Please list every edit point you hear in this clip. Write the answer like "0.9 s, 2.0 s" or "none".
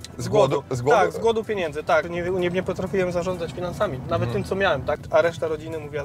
2.1 s, 5.0 s